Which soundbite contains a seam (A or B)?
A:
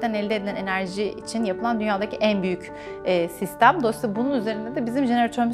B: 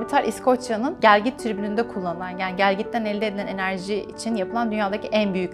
B